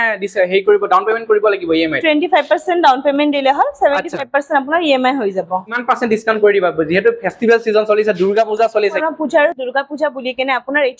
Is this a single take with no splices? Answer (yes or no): no